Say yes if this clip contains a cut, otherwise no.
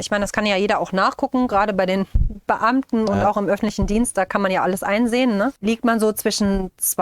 yes